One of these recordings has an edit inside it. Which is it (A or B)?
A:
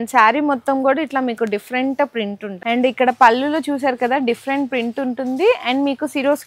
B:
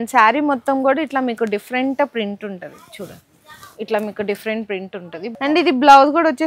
A